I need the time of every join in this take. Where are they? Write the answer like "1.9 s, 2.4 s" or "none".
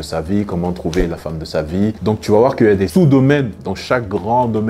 2.0 s